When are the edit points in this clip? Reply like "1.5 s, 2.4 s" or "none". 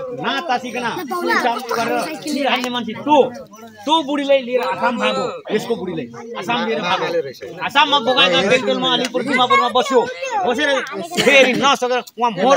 none